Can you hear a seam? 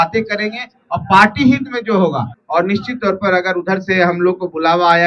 yes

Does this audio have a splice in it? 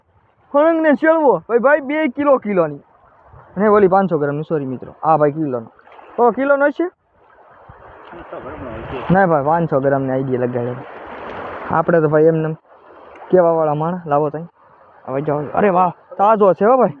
no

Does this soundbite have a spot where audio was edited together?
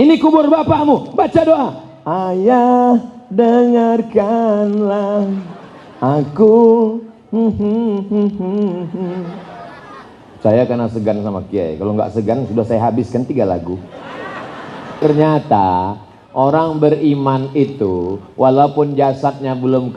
yes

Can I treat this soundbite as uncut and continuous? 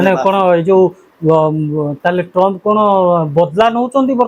yes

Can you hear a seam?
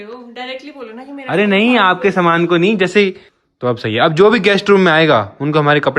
yes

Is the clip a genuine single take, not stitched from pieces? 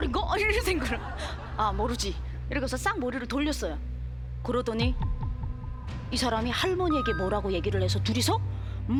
yes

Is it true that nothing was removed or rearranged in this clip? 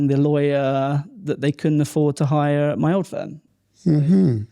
yes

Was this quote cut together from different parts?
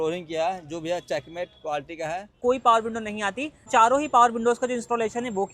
yes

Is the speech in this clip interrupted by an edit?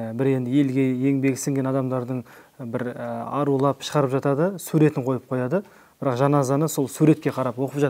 no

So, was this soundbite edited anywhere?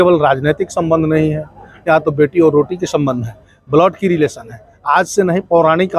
no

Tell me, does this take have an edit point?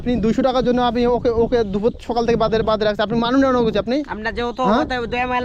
no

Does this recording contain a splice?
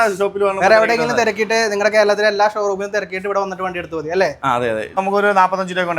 yes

